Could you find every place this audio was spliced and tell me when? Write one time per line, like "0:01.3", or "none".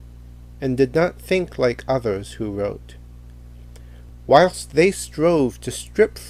0:03.8